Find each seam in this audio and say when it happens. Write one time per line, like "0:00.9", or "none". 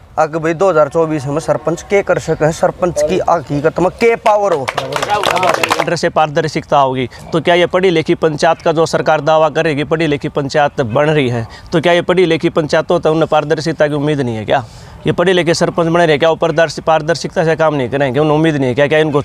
0:05.8